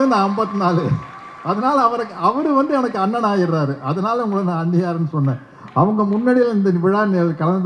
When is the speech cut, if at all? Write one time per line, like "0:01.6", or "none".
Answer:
none